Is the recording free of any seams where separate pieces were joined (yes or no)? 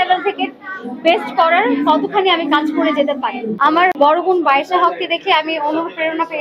no